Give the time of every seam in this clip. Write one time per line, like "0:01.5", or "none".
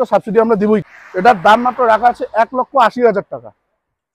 0:01.0

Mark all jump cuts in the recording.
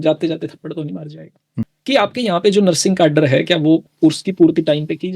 0:01.5
0:03.9

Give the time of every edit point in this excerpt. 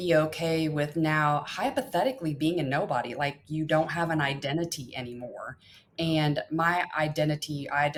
none

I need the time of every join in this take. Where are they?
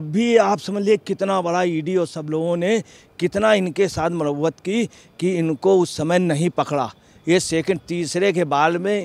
none

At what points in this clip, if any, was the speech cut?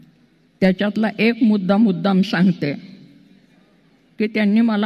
none

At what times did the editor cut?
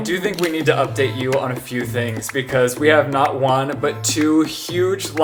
none

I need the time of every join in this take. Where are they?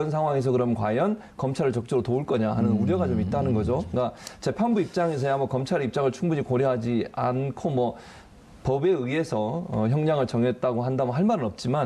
0:02.0

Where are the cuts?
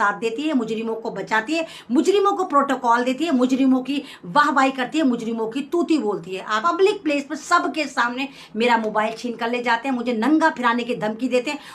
0:06.6

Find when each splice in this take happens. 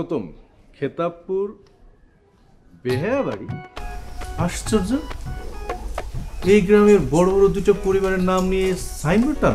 none

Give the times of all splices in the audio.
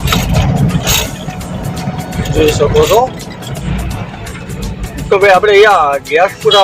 0:03.5

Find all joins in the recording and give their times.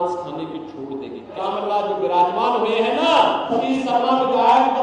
0:01.4
0:03.5

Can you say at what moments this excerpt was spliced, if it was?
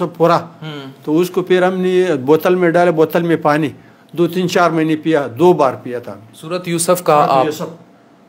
none

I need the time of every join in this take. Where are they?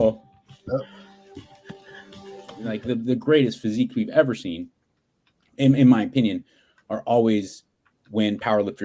0:02.7

